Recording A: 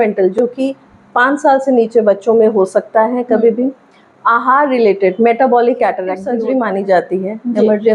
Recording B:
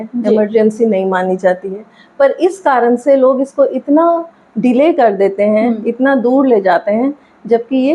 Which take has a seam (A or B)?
A